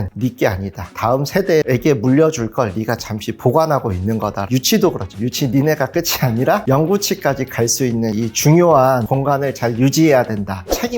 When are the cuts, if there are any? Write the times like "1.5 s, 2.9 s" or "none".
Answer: 1.0 s, 4.4 s